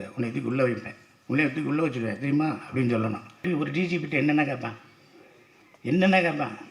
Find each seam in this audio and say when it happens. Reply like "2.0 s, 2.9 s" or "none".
3.4 s